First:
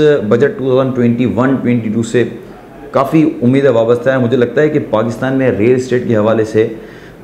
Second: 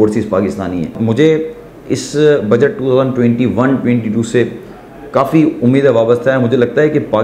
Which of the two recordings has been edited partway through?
second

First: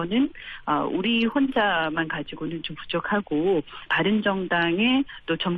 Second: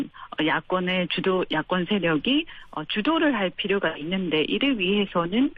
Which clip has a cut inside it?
first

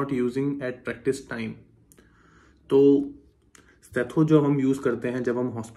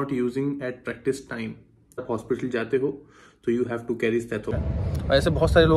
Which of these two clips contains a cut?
second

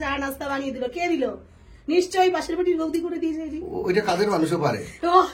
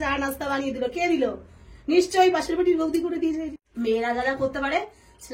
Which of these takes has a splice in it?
second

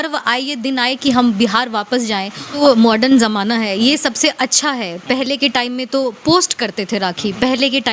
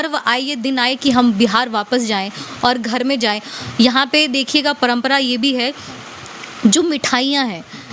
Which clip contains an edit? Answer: first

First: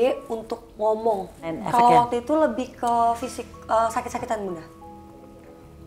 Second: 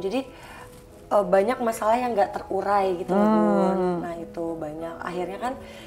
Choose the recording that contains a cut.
first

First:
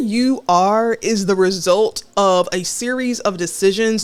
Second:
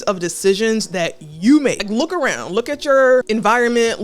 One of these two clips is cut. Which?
second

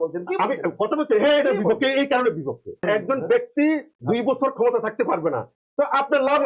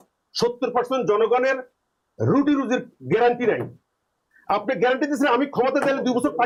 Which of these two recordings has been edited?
first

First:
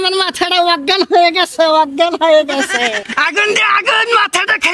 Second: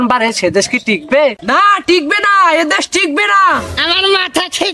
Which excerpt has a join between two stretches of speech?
second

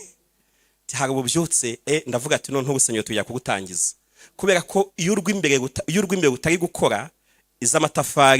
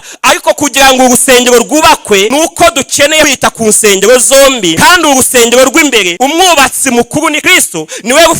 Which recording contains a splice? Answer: second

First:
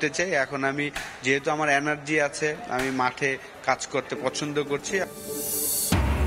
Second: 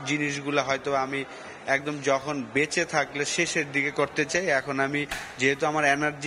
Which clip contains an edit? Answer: first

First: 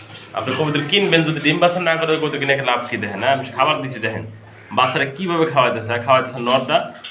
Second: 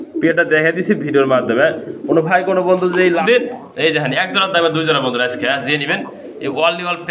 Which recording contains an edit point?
second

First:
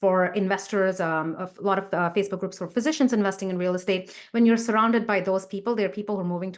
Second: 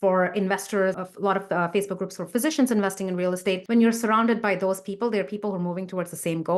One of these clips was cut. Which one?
second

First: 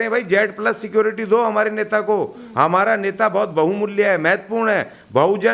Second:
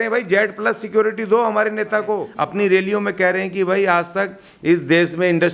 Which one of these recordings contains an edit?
second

